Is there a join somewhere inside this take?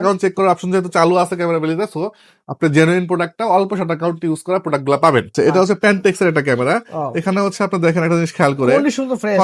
yes; 1 cut; at 5.3 s

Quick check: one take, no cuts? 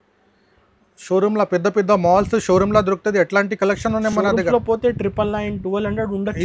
yes; 0 cuts

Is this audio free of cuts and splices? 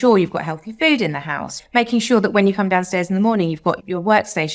no; 2 cuts; at 1.6 s, 3.8 s

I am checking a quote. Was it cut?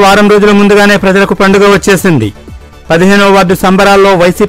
no; 0 cuts

